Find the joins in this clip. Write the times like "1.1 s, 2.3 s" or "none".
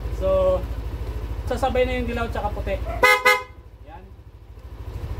1.5 s